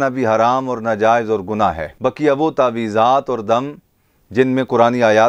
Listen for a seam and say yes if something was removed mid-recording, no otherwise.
no